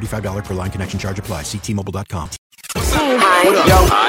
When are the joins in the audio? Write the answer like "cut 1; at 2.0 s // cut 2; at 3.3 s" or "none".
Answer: cut 1; at 2.9 s